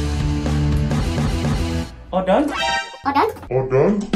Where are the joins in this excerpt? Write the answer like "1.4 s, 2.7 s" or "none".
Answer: none